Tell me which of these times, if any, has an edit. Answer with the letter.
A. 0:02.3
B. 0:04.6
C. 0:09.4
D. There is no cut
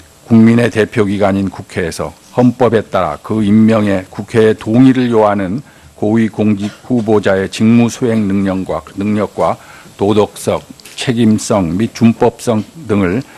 D